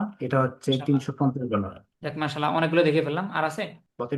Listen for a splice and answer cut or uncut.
uncut